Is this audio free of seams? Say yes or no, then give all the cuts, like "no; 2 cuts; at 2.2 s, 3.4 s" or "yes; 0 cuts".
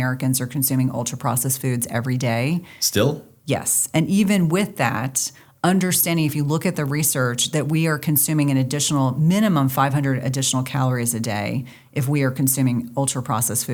yes; 0 cuts